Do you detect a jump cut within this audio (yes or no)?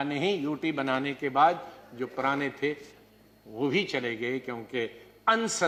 no